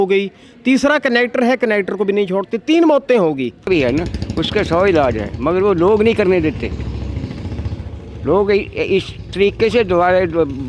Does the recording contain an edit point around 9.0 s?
no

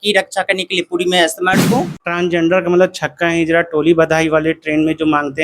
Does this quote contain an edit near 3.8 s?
no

